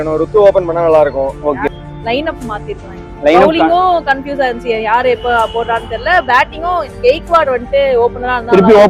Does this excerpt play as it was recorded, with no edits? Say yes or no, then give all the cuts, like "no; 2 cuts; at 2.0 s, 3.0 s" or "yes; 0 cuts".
no; 1 cut; at 1.9 s